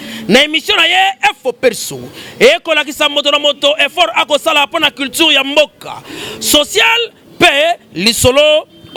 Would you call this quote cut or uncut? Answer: uncut